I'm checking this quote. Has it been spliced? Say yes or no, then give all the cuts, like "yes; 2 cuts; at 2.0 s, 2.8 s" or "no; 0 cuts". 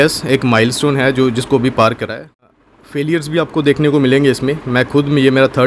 yes; 1 cut; at 2.4 s